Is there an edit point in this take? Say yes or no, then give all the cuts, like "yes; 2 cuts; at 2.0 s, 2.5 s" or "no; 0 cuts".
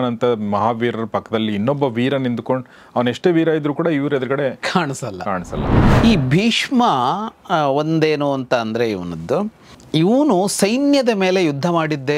yes; 2 cuts; at 5.8 s, 9.8 s